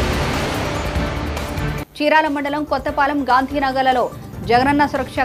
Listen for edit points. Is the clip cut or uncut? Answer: cut